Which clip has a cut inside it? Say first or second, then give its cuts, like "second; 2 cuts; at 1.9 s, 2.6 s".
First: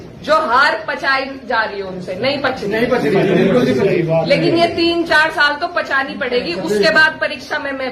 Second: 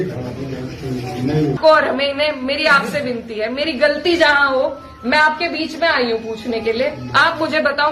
second; 1 cut; at 1.6 s